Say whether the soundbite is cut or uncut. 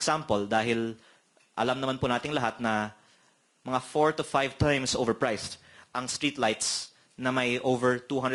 uncut